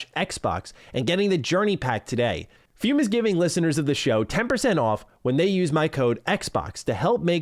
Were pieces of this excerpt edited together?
no; 0 cuts

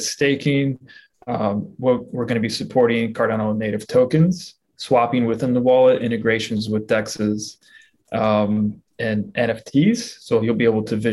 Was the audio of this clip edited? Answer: no; 0 cuts

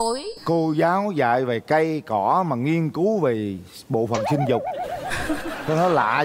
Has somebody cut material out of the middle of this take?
no; 0 cuts

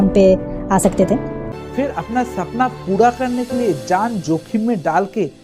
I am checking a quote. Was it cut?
yes; 1 cut; at 1.5 s

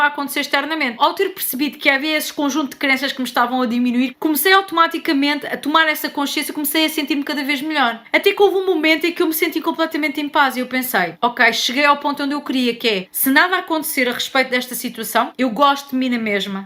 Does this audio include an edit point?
yes; 2 cuts; at 1.0 s, 15.3 s

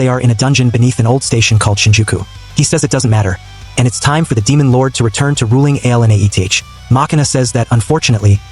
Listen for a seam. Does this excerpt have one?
no; 0 cuts

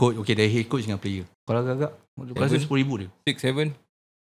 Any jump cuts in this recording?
yes; 1 cut; at 1.3 s

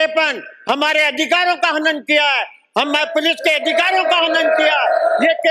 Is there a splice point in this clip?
no; 0 cuts

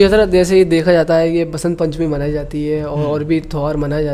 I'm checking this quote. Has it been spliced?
no; 0 cuts

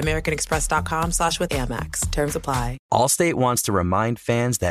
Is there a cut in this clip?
yes; 1 cut; at 2.8 s

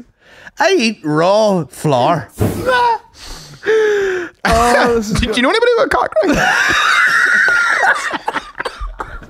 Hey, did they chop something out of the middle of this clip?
yes; 1 cut; at 2.4 s

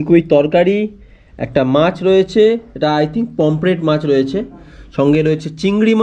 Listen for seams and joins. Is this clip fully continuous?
yes; 0 cuts

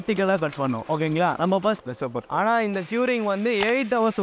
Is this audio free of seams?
no; 1 cut; at 1.8 s

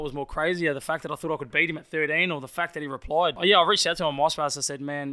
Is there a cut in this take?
yes; 1 cut; at 3.4 s

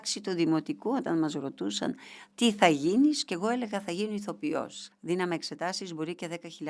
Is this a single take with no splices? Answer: no; 1 cut; at 4.8 s

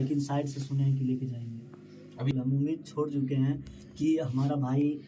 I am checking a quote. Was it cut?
yes; 1 cut; at 2.3 s

